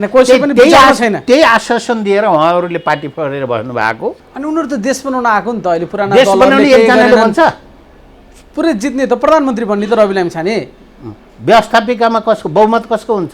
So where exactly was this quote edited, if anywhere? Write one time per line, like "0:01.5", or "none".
0:04.3